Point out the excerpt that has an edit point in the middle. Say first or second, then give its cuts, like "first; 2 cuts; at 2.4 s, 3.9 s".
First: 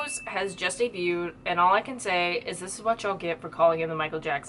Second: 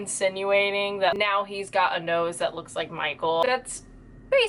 second; 2 cuts; at 1.2 s, 3.4 s